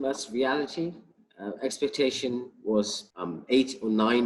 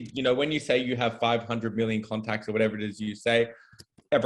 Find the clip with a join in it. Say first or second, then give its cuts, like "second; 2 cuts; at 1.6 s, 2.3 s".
first; 1 cut; at 3.1 s